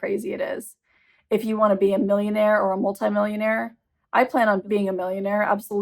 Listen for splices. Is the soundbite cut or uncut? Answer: cut